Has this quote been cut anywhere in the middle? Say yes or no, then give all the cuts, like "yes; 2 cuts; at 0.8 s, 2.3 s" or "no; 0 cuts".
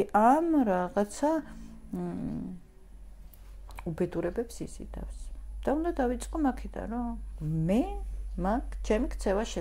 no; 0 cuts